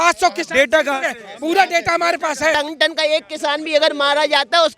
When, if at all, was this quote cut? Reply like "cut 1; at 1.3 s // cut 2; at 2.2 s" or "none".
cut 1; at 2.5 s